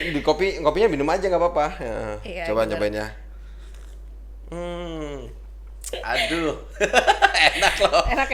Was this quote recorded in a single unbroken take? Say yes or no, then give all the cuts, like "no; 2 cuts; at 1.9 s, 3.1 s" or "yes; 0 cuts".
yes; 0 cuts